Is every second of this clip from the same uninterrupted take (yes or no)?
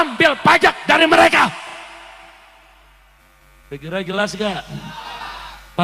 yes